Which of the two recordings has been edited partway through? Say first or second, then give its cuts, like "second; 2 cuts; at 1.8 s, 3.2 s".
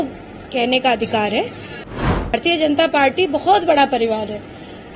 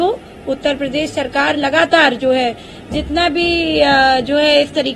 first; 1 cut; at 2.2 s